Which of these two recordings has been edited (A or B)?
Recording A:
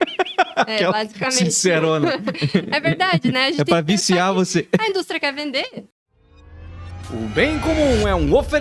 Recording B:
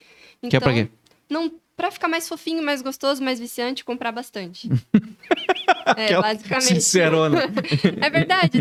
A